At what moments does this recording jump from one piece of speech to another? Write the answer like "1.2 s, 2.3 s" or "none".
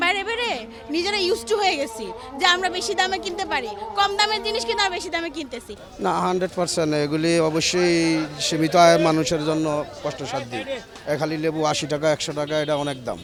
none